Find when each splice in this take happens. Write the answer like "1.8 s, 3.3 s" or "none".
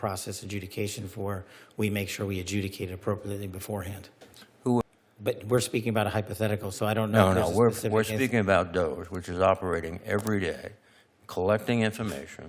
4.8 s

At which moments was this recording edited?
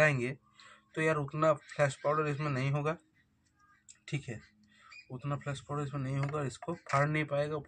none

